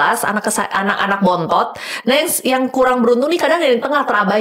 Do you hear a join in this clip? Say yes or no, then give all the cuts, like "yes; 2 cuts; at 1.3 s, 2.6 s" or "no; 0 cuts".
no; 0 cuts